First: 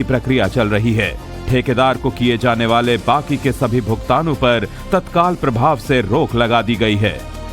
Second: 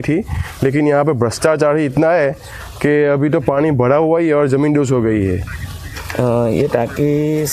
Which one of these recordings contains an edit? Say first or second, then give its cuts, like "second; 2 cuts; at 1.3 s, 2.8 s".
first; 1 cut; at 2.2 s